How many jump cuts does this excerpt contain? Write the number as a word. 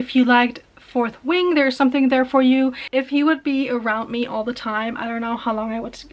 one